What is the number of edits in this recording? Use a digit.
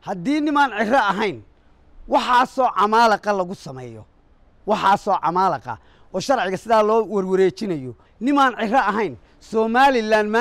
1